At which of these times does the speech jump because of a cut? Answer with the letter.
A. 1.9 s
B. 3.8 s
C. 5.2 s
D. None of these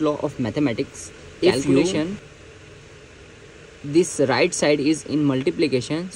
A